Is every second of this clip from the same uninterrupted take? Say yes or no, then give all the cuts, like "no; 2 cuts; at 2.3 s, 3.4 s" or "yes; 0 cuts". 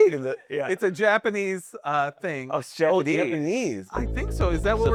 yes; 0 cuts